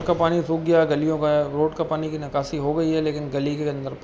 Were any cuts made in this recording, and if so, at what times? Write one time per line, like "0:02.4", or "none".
none